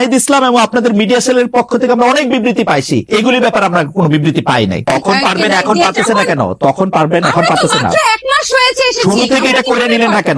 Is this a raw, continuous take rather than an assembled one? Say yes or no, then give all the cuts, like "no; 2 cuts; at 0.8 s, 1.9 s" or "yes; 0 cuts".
no; 1 cut; at 4.9 s